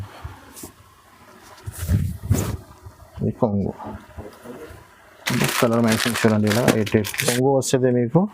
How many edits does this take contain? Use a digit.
1